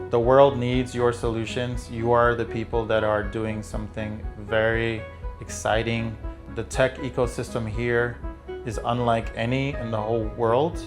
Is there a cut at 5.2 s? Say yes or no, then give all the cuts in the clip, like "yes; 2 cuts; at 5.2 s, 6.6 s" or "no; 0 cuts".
no; 1 cut; at 6.4 s